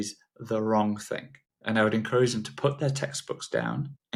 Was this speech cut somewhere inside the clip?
no; 0 cuts

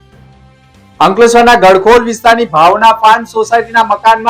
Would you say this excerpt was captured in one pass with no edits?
no; 1 cut; at 1.0 s

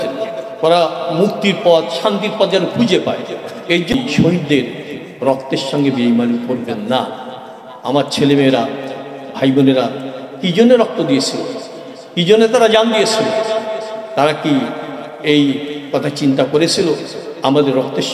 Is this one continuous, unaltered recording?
no; 1 cut; at 3.9 s

